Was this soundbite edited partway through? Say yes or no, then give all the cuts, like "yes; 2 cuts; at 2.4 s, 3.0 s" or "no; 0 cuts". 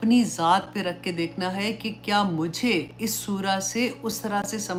no; 0 cuts